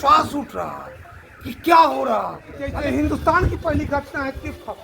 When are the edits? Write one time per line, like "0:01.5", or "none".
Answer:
0:02.8